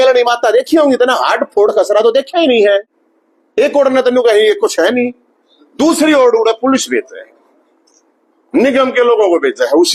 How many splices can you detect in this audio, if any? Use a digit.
0